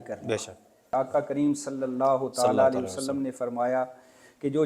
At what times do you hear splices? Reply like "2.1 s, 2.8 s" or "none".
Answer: 0.9 s